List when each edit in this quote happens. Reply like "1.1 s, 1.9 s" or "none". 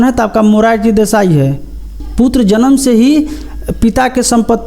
2.0 s